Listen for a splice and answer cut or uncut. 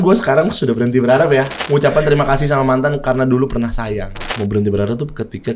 cut